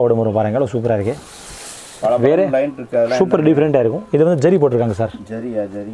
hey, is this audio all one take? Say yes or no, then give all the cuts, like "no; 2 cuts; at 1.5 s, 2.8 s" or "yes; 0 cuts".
yes; 0 cuts